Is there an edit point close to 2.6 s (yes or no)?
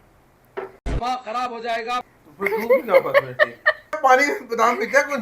no